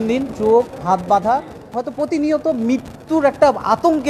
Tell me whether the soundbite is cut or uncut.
cut